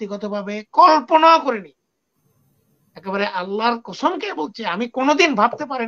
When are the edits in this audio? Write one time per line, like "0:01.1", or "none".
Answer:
none